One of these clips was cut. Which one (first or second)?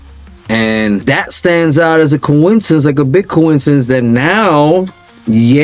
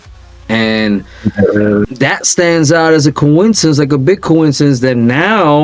first